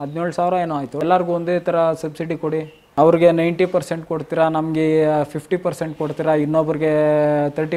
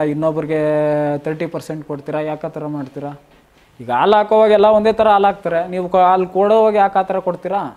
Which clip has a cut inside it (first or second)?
first